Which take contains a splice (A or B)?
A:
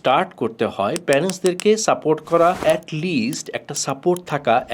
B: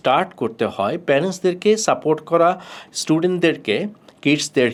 A